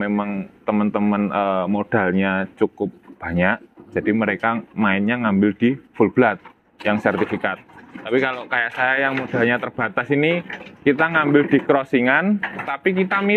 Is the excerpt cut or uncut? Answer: uncut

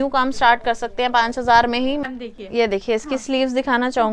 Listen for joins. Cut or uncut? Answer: cut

